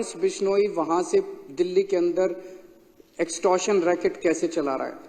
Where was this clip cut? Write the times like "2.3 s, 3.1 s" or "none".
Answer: none